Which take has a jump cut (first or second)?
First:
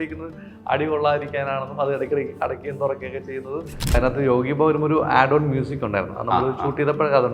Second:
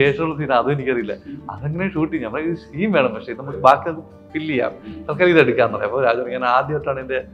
first